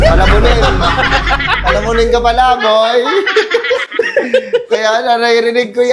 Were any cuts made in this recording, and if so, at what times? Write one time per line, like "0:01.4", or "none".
none